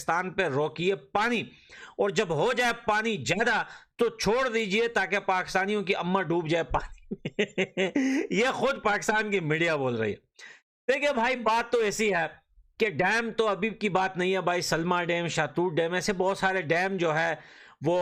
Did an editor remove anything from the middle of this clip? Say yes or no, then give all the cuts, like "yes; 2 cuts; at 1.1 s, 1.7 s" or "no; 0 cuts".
no; 0 cuts